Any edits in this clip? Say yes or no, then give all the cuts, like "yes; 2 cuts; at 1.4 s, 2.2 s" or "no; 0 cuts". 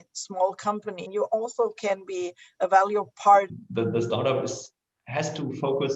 yes; 2 cuts; at 1.1 s, 3.5 s